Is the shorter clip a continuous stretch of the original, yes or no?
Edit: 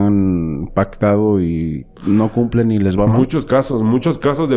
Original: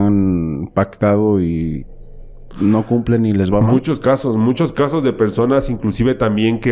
no